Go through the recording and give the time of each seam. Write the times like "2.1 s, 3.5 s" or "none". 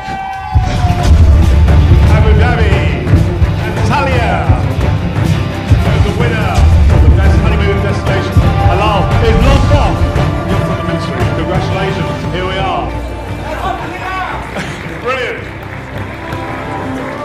none

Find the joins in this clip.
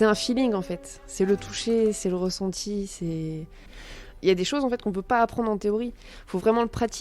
3.9 s

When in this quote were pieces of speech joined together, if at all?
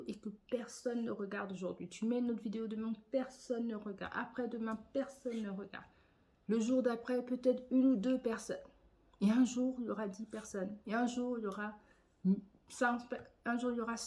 none

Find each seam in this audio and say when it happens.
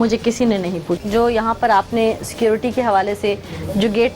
1.0 s

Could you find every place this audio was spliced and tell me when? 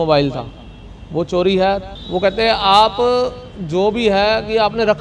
1.9 s

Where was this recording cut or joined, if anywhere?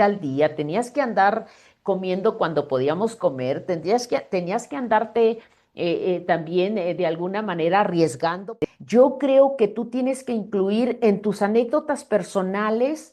8.4 s

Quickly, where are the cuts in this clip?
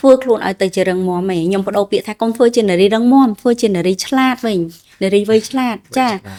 none

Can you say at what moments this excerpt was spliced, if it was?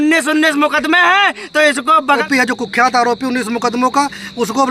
2.2 s

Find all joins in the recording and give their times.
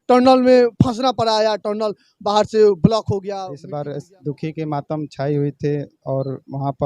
3.5 s

